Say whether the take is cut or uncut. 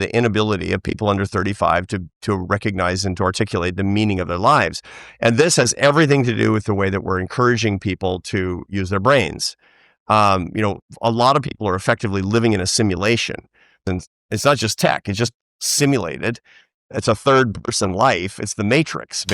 cut